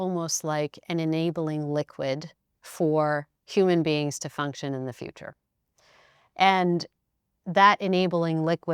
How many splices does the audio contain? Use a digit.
1